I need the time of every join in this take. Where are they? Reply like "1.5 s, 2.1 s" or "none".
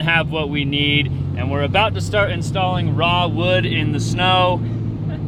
none

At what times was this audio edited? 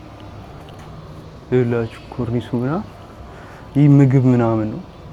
none

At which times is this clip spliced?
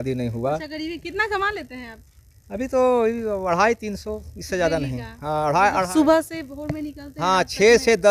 none

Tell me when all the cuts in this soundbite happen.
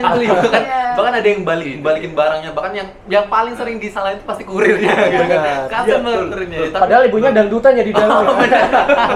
none

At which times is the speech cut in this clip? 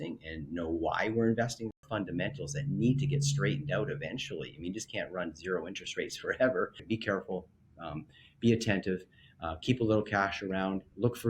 1.8 s, 6.8 s

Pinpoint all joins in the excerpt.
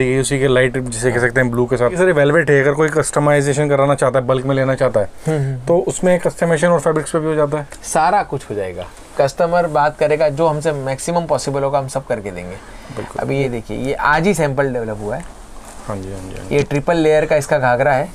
2.0 s, 13.4 s

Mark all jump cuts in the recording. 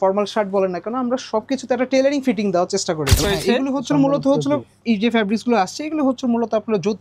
3.2 s

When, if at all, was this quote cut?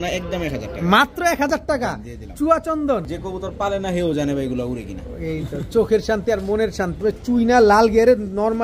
3.1 s, 7.0 s

